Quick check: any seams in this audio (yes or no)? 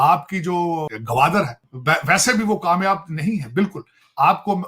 yes